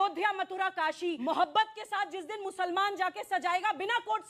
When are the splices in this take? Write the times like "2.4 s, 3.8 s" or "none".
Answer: 1.2 s